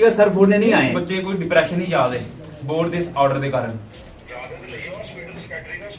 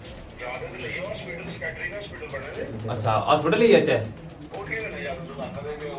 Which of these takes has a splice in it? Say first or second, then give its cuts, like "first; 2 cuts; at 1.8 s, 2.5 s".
first; 1 cut; at 0.9 s